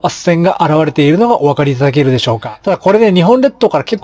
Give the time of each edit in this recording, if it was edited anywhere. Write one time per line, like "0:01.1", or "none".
0:02.6